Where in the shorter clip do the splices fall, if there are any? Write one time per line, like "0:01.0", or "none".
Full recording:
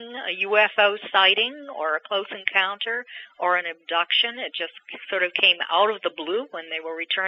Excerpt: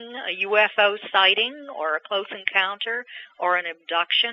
none